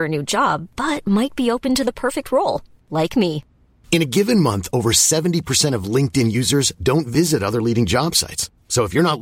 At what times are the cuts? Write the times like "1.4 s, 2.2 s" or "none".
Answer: none